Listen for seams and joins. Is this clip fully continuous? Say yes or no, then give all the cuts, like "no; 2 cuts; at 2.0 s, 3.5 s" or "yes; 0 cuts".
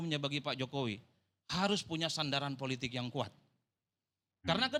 yes; 0 cuts